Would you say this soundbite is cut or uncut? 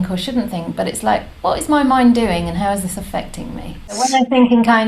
cut